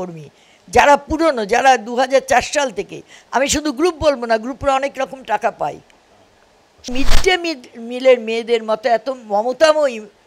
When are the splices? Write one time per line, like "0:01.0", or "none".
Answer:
0:06.9